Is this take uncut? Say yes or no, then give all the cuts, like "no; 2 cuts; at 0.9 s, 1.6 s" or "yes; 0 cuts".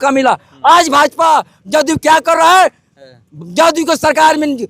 yes; 0 cuts